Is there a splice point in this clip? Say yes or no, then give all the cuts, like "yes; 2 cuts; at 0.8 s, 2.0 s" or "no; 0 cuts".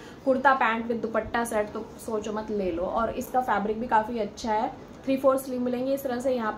no; 0 cuts